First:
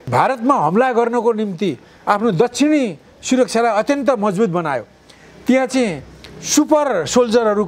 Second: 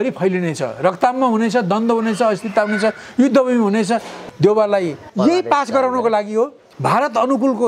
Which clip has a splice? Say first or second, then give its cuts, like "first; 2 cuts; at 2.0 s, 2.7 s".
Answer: second; 3 cuts; at 4.2 s, 5.0 s, 6.7 s